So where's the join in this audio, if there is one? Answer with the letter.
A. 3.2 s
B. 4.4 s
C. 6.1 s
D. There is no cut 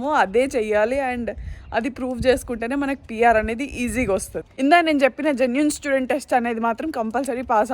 B